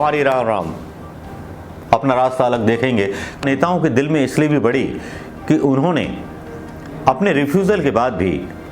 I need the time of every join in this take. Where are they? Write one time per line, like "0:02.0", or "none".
0:03.4